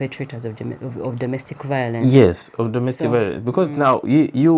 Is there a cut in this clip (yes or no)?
no